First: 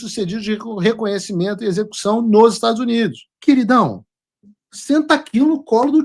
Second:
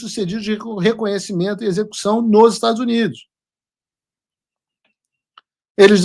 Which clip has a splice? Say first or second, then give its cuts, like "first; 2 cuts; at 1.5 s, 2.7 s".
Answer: first; 1 cut; at 3.3 s